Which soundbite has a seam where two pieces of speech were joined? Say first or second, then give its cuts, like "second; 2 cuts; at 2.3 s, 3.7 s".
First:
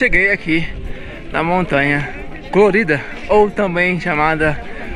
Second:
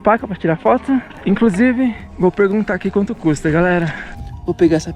second; 3 cuts; at 1.1 s, 2.1 s, 4.0 s